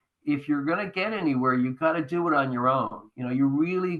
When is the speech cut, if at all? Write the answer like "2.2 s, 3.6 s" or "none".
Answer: none